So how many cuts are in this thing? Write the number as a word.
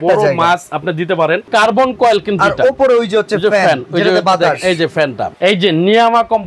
two